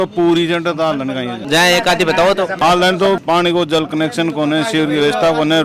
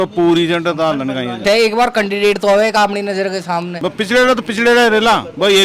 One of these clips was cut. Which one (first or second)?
second